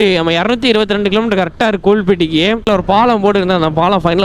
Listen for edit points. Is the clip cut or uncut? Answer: cut